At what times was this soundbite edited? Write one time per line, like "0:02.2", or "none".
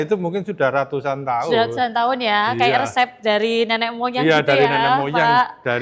none